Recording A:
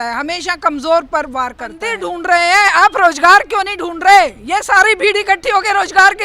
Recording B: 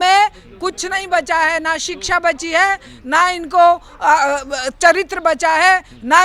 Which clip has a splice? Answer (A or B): A